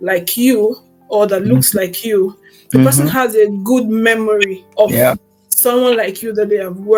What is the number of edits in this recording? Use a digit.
0